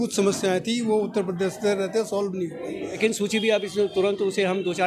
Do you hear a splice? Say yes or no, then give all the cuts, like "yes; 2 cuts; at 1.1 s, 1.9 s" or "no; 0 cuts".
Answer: yes; 1 cut; at 3.0 s